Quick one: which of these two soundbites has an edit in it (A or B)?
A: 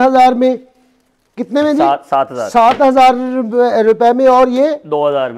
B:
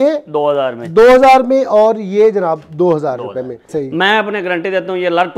B